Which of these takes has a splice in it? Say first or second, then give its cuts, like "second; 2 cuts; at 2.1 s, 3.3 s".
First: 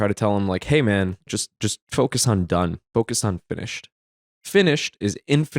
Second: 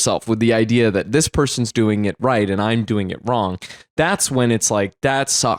first; 2 cuts; at 1.2 s, 4.1 s